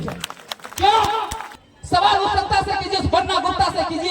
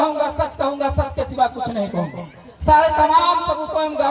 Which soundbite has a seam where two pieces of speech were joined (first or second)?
first